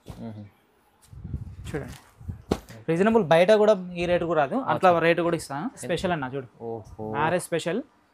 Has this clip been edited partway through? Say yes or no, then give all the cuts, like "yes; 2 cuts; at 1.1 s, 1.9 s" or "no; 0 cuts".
yes; 1 cut; at 5.9 s